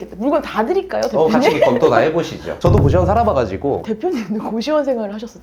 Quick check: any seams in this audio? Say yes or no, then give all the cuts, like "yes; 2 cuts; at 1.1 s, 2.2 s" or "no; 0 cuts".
yes; 2 cuts; at 2.4 s, 3.8 s